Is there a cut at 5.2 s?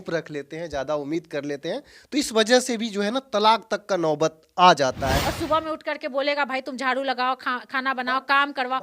yes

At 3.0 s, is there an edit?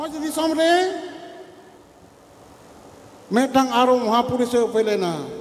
no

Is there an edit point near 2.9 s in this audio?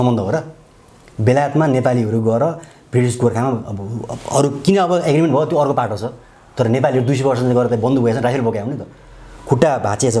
no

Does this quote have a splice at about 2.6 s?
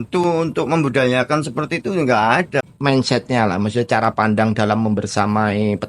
yes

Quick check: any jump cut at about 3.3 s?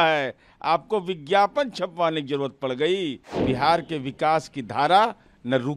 yes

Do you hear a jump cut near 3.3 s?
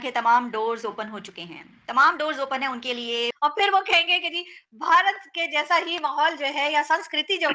yes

